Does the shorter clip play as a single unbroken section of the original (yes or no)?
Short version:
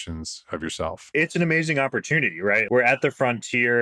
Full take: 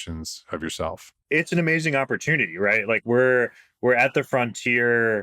no